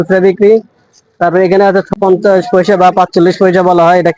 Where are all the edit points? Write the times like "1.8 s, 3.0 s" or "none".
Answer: 1.9 s